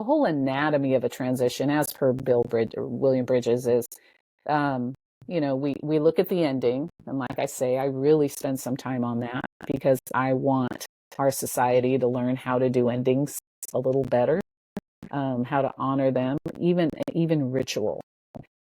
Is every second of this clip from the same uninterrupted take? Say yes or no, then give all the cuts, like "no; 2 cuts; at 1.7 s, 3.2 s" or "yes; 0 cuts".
yes; 0 cuts